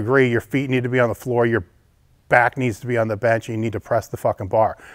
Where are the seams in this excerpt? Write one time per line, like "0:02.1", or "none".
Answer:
none